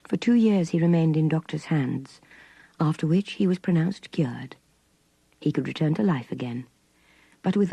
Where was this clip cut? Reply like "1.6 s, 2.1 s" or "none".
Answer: 1.4 s